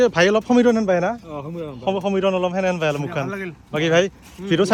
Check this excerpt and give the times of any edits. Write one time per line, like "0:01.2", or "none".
none